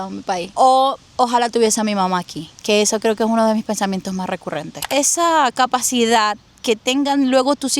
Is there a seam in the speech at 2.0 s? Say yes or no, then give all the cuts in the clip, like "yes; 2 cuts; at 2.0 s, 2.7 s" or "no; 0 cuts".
no; 1 cut; at 4.9 s